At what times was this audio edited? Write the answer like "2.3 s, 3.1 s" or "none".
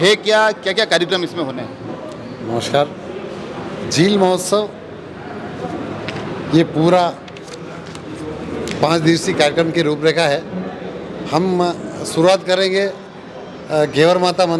none